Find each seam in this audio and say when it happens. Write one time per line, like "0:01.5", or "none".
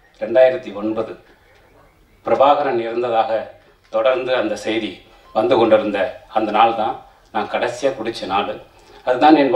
none